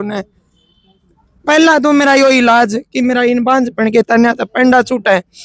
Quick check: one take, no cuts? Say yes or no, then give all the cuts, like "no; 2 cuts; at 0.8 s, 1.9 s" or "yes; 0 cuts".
yes; 0 cuts